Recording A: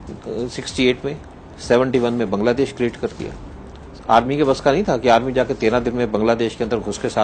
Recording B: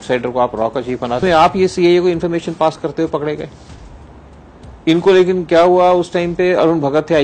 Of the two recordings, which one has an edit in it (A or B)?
B